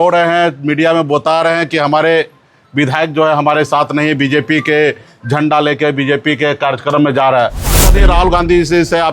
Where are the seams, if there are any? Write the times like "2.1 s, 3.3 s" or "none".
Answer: 7.9 s